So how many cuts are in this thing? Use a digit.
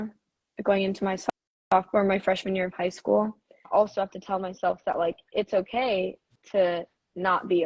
1